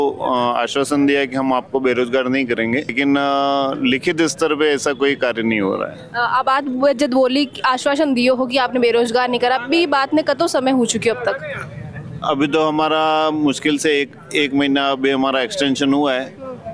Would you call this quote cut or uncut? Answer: uncut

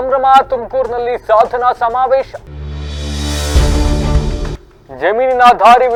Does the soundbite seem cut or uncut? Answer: uncut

